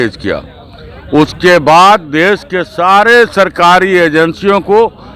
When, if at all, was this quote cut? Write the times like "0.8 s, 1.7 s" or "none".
none

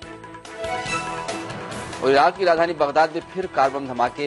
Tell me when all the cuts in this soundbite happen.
1.9 s

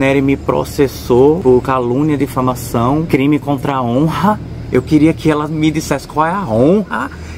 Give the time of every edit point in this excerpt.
1.4 s, 3.1 s

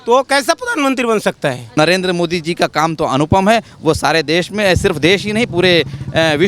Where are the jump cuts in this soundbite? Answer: 1.7 s

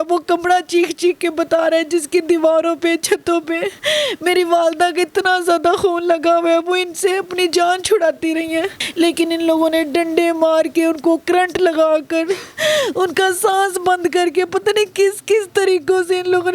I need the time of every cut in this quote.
8.8 s

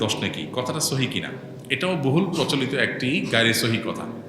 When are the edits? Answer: none

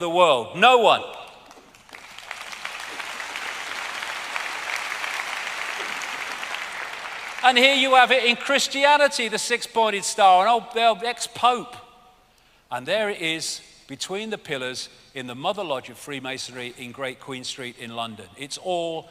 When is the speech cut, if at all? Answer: 14.8 s

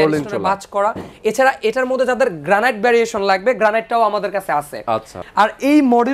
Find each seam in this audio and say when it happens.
5.1 s

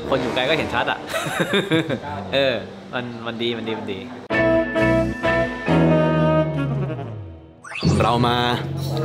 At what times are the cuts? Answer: none

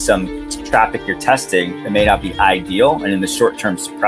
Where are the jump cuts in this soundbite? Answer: none

